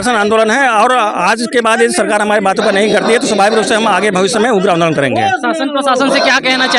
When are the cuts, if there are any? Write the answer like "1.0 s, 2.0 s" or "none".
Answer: none